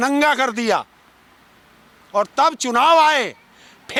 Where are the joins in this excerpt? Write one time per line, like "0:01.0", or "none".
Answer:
none